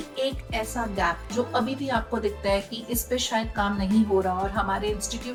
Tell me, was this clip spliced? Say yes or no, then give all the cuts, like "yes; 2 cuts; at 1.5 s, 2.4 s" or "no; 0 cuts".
no; 0 cuts